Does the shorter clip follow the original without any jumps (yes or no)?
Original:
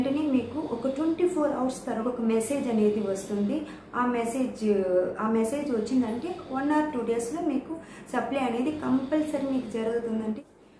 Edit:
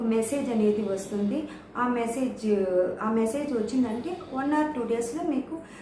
yes